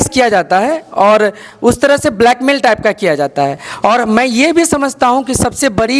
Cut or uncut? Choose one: uncut